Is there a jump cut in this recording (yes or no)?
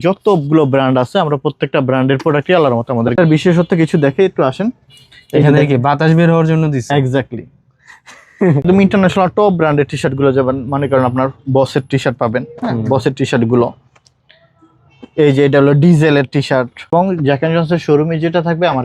yes